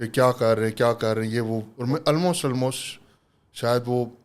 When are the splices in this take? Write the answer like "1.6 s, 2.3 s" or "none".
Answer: 1.7 s